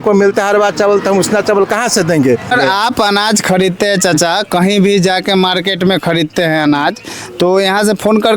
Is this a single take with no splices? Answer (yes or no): no